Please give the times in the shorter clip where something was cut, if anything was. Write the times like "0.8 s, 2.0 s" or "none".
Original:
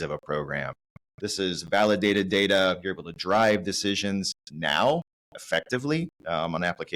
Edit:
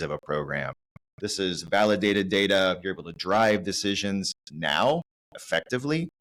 none